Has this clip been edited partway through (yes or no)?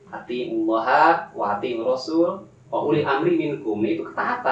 no